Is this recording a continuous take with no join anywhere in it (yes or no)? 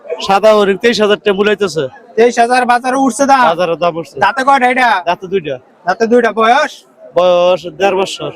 yes